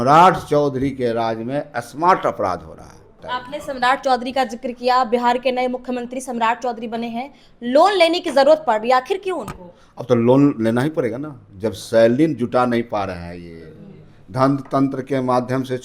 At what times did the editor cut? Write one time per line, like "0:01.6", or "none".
0:03.2